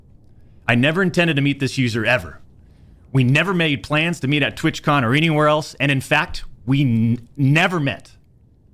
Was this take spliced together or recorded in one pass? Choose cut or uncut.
uncut